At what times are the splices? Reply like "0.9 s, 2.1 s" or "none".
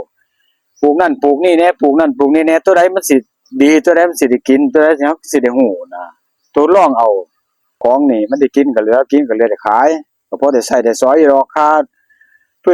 7.8 s